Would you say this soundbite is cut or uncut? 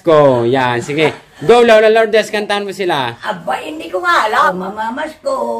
cut